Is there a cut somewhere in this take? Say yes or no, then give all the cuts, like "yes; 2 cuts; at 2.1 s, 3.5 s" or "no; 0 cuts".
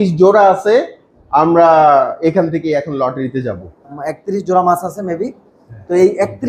yes; 1 cut; at 3.8 s